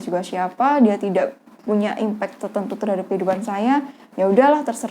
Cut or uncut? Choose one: uncut